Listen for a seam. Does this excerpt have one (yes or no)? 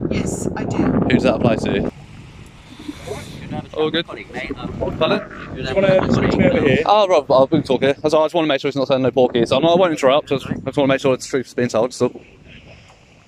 yes